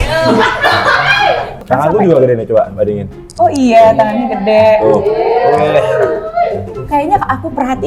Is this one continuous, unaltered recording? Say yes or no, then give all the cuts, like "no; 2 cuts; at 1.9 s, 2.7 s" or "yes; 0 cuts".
no; 2 cuts; at 1.6 s, 6.9 s